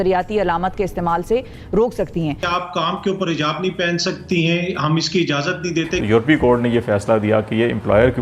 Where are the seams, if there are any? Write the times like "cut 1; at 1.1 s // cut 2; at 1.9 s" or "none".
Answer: cut 1; at 2.4 s // cut 2; at 6.0 s